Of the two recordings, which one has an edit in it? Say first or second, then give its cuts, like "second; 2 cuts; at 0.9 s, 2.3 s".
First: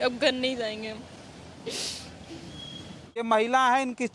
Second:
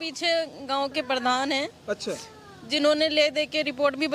first; 1 cut; at 3.2 s